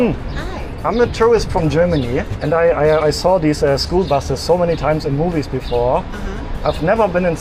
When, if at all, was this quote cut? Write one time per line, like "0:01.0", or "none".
none